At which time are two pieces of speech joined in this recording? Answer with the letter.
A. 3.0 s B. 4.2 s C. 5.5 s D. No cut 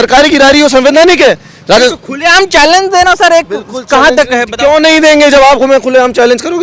D